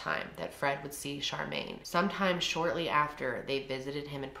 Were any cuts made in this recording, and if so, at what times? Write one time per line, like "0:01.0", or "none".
none